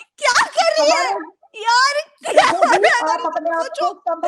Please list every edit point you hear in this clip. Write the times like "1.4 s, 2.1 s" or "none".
none

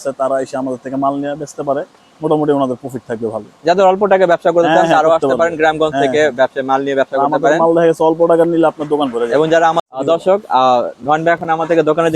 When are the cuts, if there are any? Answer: 9.8 s

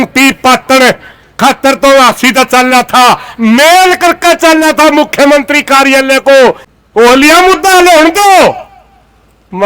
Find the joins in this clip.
6.7 s

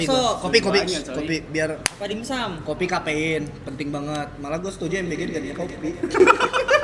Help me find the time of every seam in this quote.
none

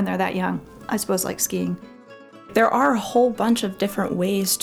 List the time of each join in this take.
2.4 s

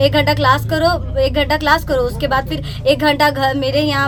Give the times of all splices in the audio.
none

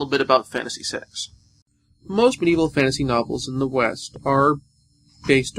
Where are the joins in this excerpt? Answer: 2.7 s

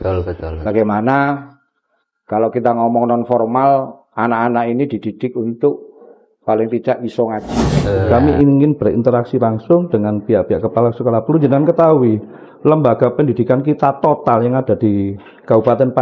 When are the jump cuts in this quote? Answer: 8.0 s

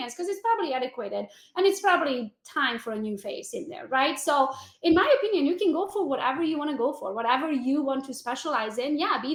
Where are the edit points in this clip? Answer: none

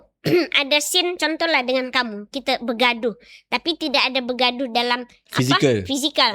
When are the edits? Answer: 5.2 s

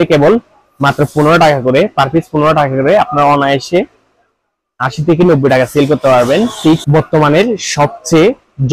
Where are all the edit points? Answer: 6.8 s

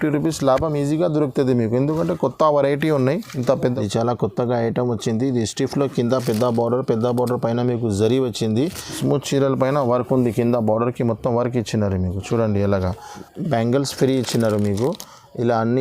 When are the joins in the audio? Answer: 3.6 s, 8.9 s, 13.3 s

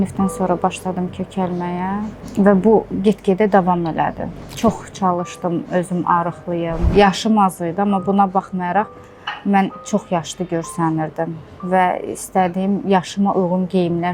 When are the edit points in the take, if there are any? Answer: 6.9 s

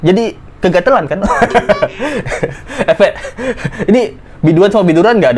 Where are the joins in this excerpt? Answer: none

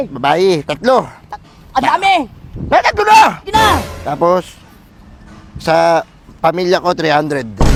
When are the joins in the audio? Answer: none

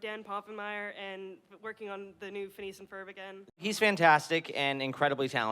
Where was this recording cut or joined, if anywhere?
3.6 s

